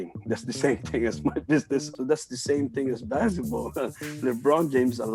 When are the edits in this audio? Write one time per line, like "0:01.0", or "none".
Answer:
0:01.9